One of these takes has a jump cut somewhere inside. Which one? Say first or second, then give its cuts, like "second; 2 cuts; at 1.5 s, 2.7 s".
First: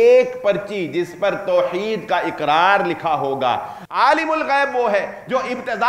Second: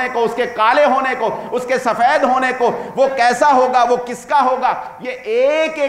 first; 1 cut; at 3.8 s